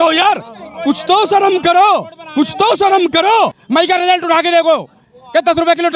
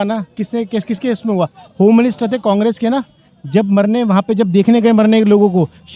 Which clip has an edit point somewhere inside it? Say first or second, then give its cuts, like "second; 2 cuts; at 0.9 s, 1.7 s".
first; 1 cut; at 3.6 s